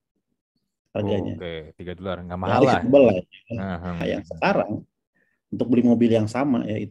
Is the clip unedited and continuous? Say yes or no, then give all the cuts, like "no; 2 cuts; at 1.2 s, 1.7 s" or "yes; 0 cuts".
no; 1 cut; at 4.0 s